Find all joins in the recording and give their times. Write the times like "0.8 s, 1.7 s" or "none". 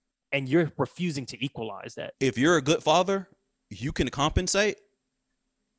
2.1 s